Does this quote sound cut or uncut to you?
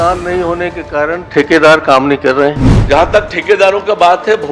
cut